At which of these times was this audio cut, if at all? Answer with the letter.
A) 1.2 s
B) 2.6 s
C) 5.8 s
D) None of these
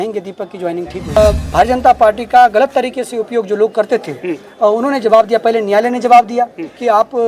A